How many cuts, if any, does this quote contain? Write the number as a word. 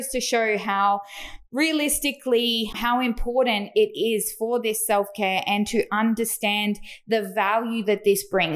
one